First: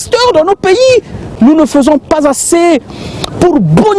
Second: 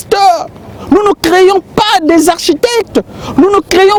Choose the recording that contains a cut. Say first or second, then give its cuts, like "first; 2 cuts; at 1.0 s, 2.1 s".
first; 1 cut; at 1.3 s